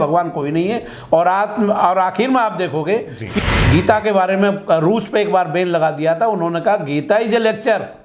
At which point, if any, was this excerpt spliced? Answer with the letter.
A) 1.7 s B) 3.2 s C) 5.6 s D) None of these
B